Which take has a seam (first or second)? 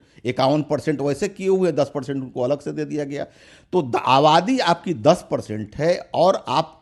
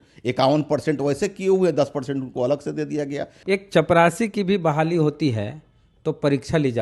second